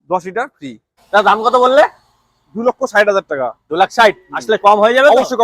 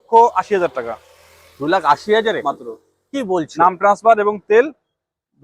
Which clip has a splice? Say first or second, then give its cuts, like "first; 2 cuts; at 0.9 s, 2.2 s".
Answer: first; 1 cut; at 1.1 s